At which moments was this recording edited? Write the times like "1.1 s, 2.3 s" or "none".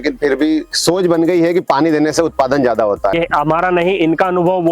3.1 s